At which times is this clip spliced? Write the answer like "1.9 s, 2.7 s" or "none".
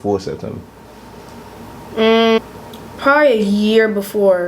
2.4 s